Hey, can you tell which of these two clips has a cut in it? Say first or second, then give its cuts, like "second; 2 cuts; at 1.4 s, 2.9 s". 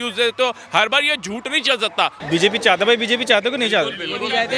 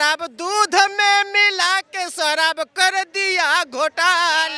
first; 1 cut; at 2.2 s